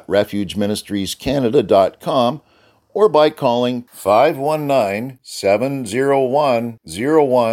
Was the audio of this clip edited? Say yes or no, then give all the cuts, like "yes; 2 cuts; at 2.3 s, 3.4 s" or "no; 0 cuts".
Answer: no; 0 cuts